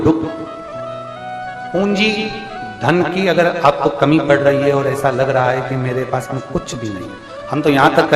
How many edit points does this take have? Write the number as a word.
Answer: zero